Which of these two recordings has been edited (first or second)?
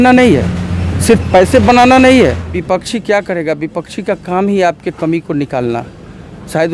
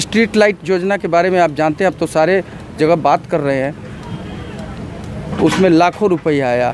first